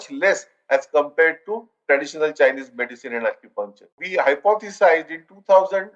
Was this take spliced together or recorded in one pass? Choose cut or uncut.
cut